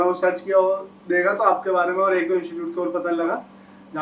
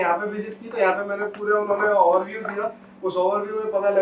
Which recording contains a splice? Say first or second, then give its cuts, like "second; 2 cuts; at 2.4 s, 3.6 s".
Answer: first; 1 cut; at 1.0 s